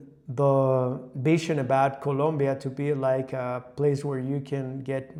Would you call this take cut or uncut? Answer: uncut